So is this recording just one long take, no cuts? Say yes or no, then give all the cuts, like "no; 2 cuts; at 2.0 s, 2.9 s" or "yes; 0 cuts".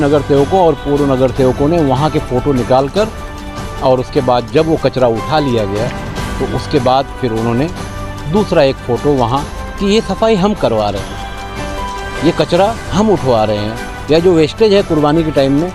yes; 0 cuts